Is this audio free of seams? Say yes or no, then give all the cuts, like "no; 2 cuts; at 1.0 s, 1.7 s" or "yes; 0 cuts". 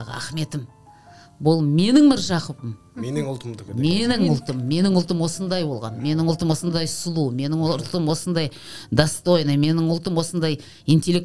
yes; 0 cuts